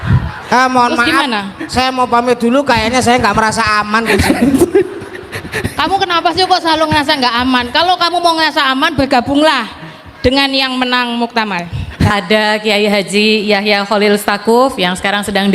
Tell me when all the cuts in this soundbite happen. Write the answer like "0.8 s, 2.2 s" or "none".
12.1 s